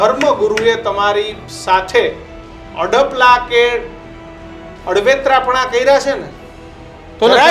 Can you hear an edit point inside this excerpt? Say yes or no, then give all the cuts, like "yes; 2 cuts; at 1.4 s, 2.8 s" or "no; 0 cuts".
no; 0 cuts